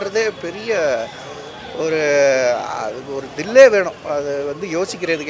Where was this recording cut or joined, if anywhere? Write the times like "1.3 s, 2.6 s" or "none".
none